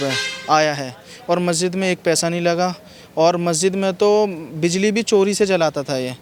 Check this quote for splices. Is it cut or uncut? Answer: uncut